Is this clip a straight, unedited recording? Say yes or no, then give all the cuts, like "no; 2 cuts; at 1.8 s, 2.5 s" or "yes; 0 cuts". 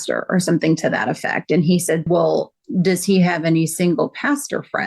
no; 1 cut; at 2.1 s